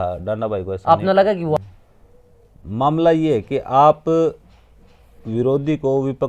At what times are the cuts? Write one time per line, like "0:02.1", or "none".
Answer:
0:01.6

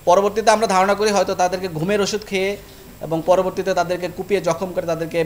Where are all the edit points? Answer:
none

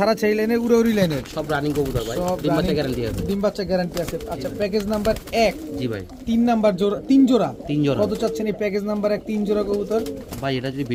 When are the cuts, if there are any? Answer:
none

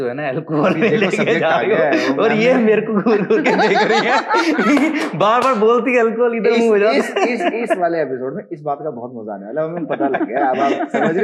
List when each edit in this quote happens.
none

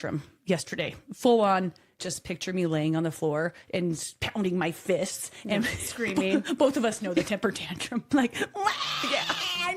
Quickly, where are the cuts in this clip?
0:02.0
0:04.1
0:08.0

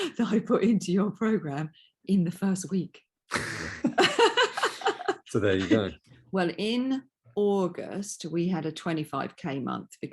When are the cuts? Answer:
0:06.1

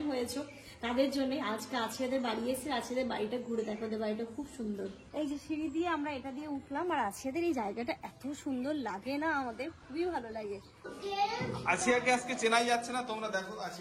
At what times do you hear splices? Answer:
0:05.0
0:10.9

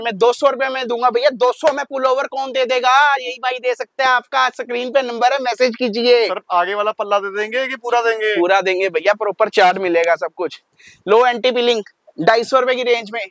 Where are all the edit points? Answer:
none

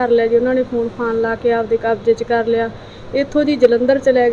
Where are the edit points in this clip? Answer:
none

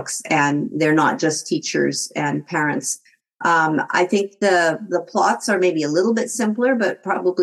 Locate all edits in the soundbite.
none

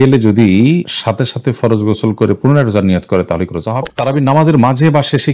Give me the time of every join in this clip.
0:03.9

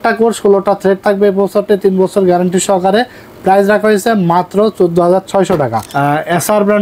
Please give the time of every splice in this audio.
0:05.8

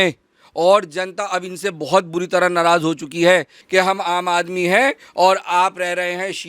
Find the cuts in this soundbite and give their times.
0:03.6

